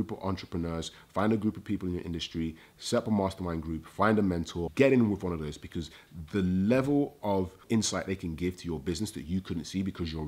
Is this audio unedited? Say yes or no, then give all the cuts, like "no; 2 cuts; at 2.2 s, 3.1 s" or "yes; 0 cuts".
no; 1 cut; at 4.7 s